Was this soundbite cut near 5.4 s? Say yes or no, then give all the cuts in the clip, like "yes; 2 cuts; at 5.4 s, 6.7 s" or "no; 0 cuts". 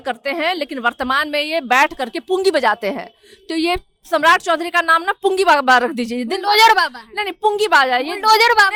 no; 0 cuts